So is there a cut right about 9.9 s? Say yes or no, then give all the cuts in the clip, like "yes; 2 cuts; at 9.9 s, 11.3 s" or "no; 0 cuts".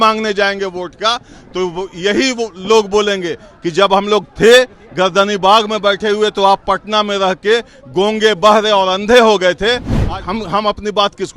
yes; 1 cut; at 9.9 s